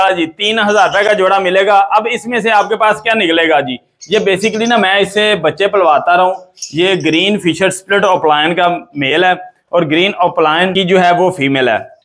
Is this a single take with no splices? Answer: yes; 0 cuts

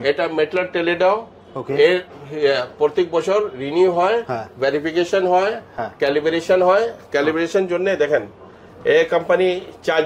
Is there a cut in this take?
no; 0 cuts

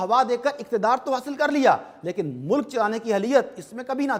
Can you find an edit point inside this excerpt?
no; 0 cuts

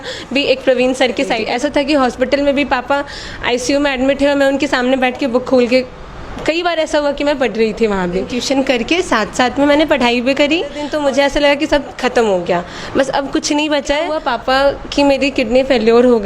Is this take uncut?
no; 4 cuts; at 1.4 s, 8.4 s, 10.8 s, 14.1 s

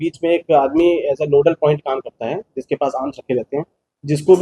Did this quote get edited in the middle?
no; 0 cuts

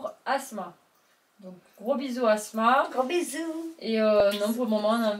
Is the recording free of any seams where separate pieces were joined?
yes; 0 cuts

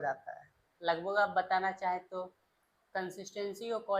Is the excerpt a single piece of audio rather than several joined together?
no; 1 cut; at 2.4 s

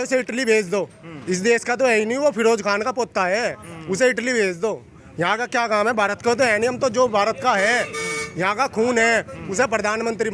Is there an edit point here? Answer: no; 0 cuts

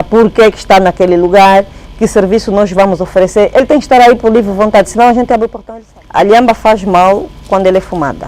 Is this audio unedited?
no; 1 cut; at 5.6 s

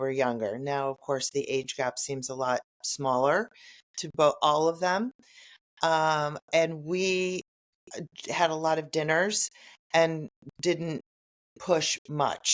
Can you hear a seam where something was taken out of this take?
no; 0 cuts

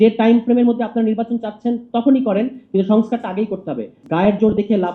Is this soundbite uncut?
no; 1 cut; at 4.0 s

